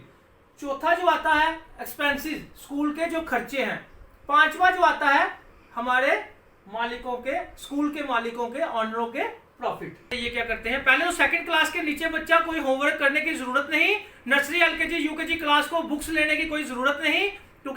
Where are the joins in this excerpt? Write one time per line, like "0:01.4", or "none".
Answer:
0:10.1